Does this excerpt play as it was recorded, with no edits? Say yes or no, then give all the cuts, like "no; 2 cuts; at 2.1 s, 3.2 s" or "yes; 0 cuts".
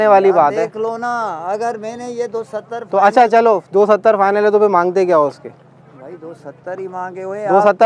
yes; 0 cuts